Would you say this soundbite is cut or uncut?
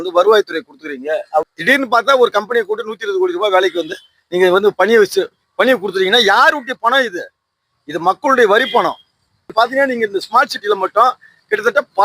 cut